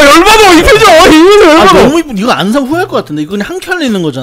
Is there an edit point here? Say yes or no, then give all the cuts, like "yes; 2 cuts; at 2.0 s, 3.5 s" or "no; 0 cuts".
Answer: no; 0 cuts